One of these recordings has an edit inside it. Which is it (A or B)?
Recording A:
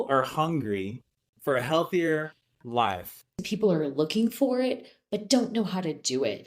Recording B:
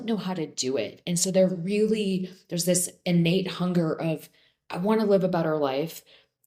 A